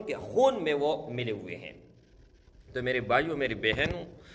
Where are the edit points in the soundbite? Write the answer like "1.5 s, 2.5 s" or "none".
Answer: none